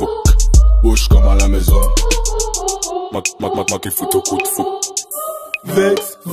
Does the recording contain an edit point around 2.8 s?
no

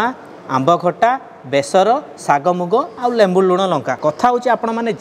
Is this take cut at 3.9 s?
yes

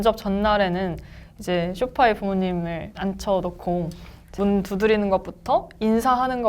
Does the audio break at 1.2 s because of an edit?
no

